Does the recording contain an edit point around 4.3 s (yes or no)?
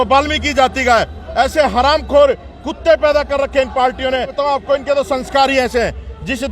yes